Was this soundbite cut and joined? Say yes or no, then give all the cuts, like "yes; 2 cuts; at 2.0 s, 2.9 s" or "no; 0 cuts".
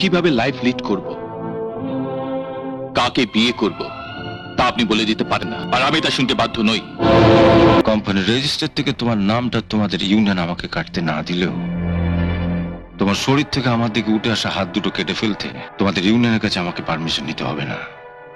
yes; 2 cuts; at 7.8 s, 15.6 s